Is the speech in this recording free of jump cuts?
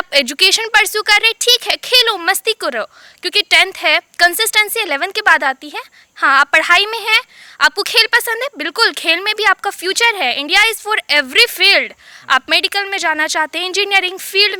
yes; 0 cuts

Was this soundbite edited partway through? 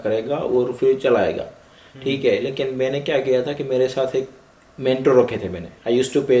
no; 0 cuts

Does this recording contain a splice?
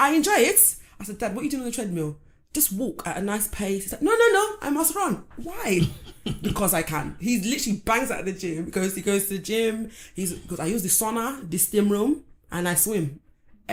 no; 0 cuts

